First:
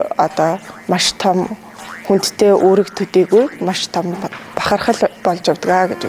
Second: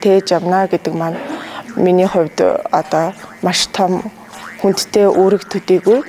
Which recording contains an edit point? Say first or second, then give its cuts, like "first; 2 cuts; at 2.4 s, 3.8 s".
first; 1 cut; at 5.2 s